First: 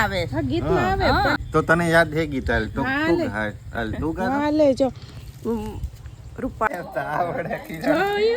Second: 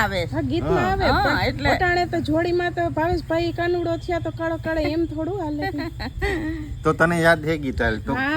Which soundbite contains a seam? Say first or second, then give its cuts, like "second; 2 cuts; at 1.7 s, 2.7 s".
first; 2 cuts; at 1.4 s, 6.7 s